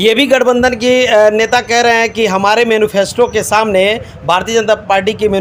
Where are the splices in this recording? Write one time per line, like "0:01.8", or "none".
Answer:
none